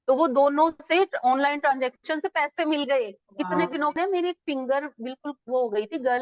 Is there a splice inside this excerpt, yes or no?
yes